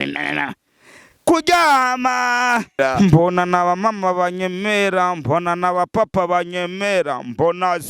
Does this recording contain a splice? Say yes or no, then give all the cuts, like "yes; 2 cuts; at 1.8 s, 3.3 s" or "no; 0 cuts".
yes; 1 cut; at 2.7 s